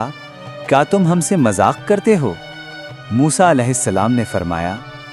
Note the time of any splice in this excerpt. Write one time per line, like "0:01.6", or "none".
none